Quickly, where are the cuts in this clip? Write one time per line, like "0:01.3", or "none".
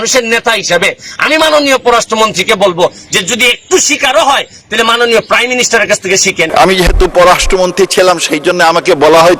0:06.4